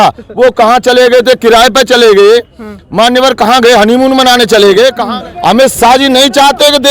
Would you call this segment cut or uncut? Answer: cut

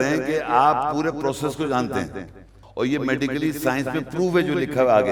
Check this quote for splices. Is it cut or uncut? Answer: cut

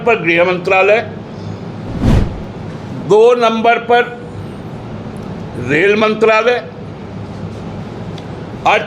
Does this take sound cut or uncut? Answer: cut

